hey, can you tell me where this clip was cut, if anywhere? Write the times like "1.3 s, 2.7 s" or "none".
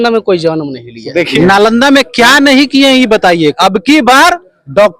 1.3 s, 3.6 s